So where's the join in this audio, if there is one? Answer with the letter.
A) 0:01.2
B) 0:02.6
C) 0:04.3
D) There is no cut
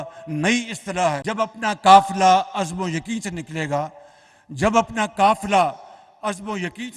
A